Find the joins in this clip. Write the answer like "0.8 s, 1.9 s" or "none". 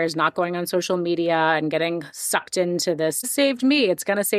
3.3 s